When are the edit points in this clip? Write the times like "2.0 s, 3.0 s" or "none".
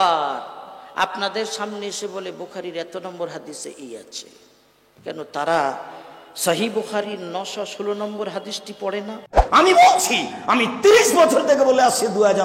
9.4 s